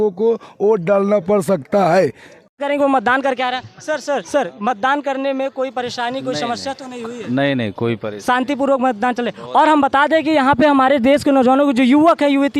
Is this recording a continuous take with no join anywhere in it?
no; 1 cut; at 2.3 s

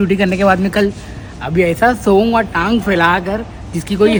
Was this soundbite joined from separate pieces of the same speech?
no; 0 cuts

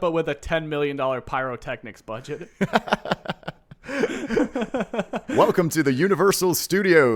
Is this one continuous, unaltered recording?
yes; 0 cuts

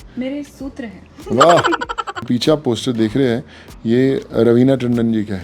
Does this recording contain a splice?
yes; 1 cut; at 2.2 s

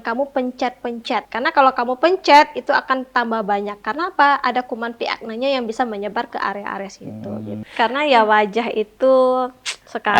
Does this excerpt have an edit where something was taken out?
yes; 2 cuts; at 1.3 s, 7.7 s

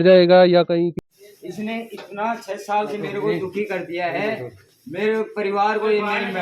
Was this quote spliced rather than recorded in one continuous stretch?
yes; 1 cut; at 1.0 s

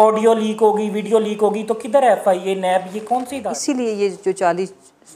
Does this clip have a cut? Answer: yes; 1 cut; at 3.5 s

